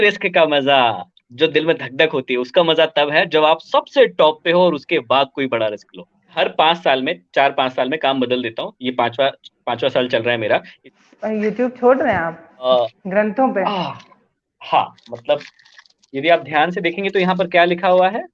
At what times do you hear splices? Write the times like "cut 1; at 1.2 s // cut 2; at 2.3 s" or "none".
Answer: cut 1; at 6.3 s // cut 2; at 10.8 s // cut 3; at 12.7 s